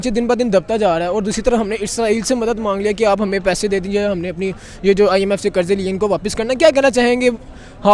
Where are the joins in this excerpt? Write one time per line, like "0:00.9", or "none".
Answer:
none